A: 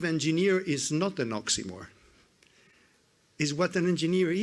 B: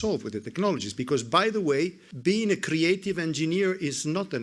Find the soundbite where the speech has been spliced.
B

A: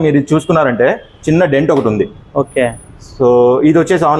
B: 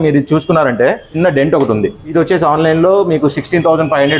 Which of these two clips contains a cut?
B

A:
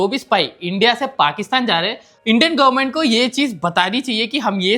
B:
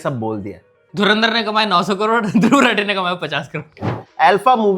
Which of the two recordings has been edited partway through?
B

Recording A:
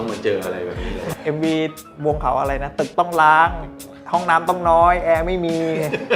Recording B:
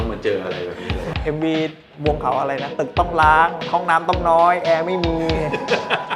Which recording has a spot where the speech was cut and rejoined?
B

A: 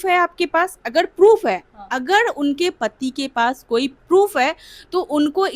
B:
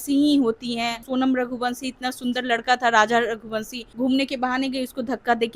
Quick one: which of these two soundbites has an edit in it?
B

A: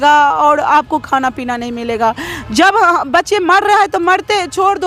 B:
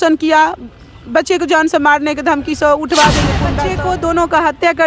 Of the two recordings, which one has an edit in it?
B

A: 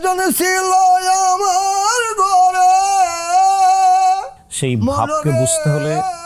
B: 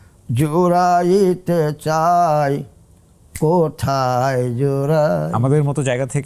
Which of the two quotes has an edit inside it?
B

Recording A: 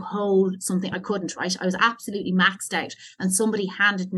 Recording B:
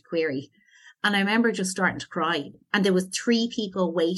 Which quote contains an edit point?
B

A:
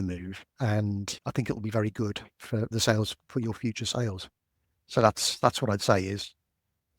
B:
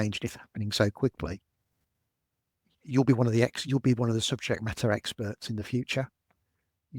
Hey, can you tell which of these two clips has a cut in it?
A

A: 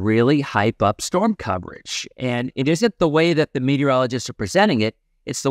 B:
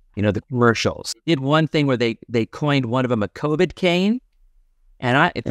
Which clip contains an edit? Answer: B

